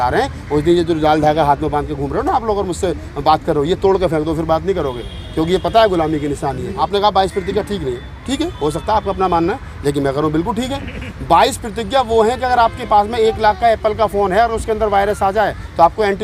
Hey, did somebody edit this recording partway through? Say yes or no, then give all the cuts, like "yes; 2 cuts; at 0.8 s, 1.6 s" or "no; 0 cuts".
yes; 1 cut; at 6.8 s